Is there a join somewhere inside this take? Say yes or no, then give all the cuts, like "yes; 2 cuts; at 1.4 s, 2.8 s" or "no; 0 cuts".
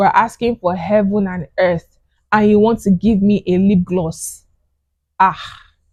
no; 0 cuts